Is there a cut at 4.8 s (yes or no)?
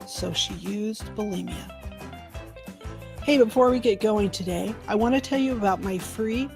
no